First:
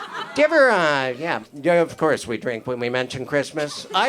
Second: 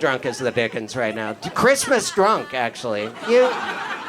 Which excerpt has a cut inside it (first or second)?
first